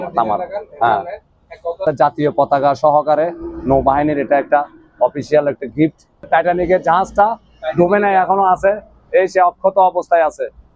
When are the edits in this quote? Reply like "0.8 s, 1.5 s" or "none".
1.8 s, 6.3 s